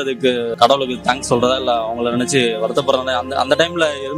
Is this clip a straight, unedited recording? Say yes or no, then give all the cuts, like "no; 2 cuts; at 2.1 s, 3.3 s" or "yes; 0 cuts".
yes; 0 cuts